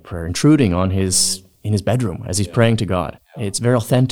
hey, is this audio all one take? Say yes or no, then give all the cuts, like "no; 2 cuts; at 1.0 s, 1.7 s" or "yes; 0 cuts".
no; 1 cut; at 3.2 s